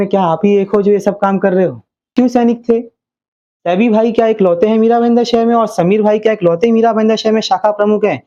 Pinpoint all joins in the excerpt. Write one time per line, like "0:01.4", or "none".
0:02.1